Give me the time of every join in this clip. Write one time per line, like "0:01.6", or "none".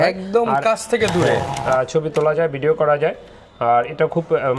0:01.5